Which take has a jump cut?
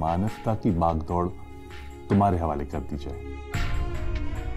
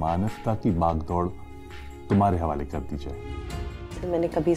second; 1 cut; at 3.3 s

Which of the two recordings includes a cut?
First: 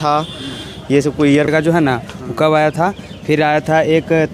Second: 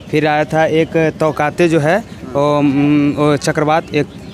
first; 1 cut; at 1.5 s

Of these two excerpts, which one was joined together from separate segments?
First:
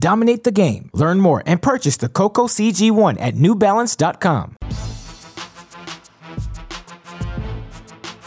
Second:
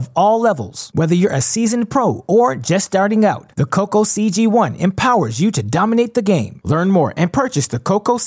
first; 2 cuts; at 4.6 s, 7.4 s

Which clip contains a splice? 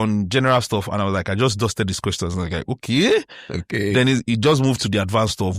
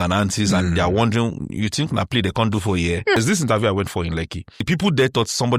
second; 2 cuts; at 3.2 s, 4.6 s

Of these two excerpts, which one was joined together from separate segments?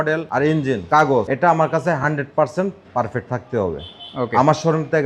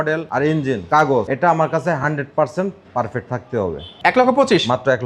second; 1 cut; at 3.9 s

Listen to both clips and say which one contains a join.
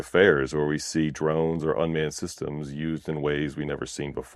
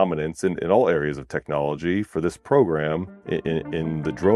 second; 1 cut; at 3.1 s

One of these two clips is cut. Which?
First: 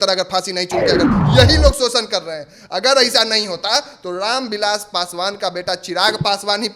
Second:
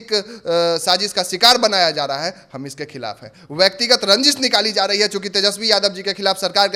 first; 1 cut; at 1.2 s

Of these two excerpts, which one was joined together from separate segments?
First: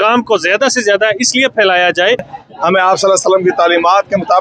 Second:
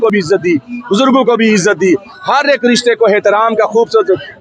first; 1 cut; at 2.4 s

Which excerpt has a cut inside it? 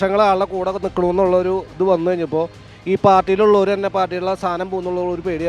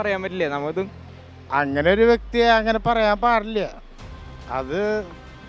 second; 1 cut; at 1.1 s

